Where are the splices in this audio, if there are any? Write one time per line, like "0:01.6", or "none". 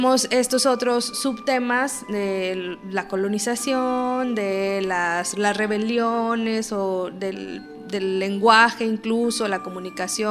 none